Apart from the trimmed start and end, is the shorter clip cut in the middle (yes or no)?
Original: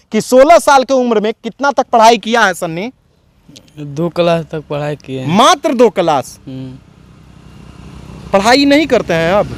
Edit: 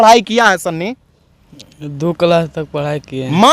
no